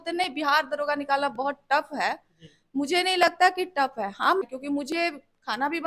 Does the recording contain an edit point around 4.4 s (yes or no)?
yes